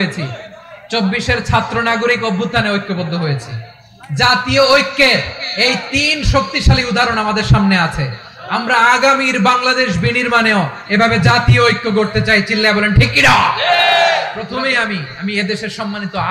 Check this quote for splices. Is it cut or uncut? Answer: cut